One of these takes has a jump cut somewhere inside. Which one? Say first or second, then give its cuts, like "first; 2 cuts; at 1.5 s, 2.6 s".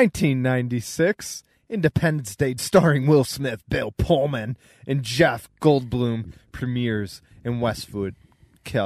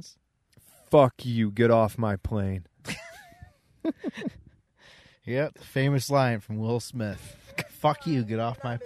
first; 1 cut; at 2.6 s